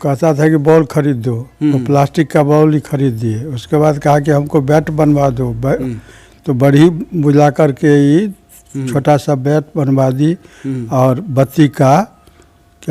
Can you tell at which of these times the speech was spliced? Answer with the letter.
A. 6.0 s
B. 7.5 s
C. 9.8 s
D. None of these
D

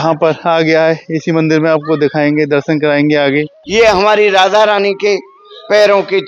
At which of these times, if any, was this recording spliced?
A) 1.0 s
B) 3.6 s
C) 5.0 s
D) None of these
B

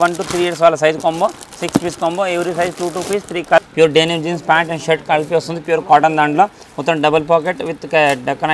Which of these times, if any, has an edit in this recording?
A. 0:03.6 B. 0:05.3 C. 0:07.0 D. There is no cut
A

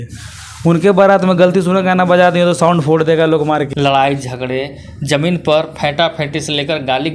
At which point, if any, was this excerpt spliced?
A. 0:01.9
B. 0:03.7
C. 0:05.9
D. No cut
B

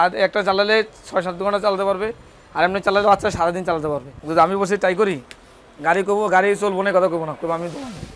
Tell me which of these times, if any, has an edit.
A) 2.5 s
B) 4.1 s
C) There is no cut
B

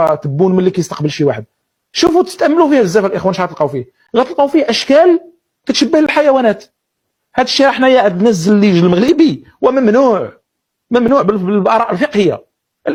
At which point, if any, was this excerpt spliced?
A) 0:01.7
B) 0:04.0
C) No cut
C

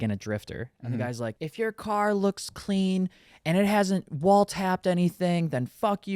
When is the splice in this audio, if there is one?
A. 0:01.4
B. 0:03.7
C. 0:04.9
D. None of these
A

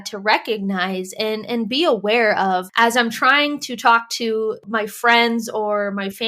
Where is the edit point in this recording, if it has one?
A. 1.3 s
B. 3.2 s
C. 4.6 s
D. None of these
C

